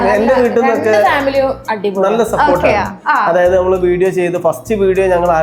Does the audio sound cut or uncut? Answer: uncut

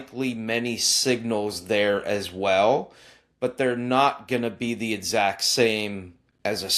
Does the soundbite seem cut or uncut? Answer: uncut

